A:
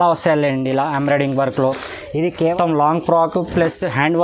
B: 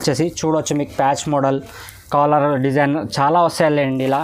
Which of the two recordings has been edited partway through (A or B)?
A